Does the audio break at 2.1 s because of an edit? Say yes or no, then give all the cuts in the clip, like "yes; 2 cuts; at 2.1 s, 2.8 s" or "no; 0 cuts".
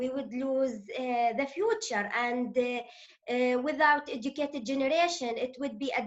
no; 0 cuts